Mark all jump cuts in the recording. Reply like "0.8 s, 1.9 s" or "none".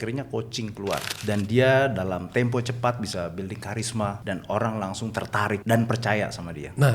1.1 s, 4.2 s, 5.6 s